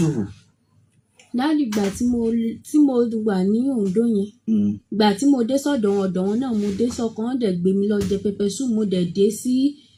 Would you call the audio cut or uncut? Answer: uncut